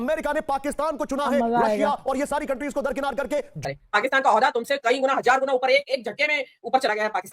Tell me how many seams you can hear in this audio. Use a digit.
1